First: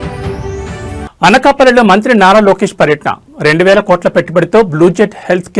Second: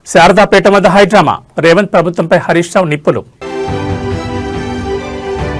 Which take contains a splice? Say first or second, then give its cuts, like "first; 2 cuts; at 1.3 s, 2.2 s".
first; 1 cut; at 1.0 s